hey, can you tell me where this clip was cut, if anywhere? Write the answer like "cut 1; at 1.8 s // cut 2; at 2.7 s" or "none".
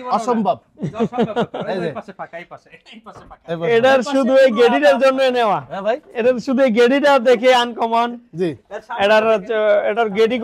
none